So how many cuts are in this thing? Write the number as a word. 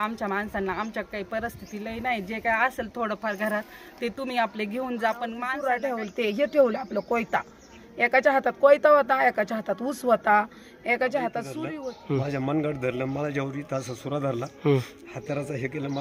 two